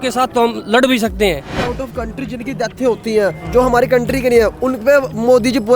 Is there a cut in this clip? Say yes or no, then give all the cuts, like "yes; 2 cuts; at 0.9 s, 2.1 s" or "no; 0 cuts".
yes; 1 cut; at 1.6 s